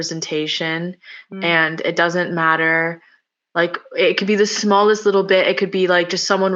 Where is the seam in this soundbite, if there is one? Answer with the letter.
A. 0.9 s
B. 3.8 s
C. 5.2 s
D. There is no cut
D